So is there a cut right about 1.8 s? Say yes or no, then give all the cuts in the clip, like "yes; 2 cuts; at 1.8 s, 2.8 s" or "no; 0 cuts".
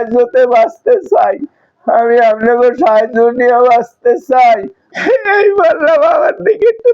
no; 1 cut; at 4.9 s